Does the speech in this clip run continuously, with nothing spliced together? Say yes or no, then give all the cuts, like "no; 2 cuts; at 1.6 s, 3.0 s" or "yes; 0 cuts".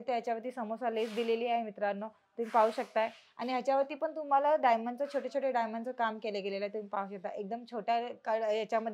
yes; 0 cuts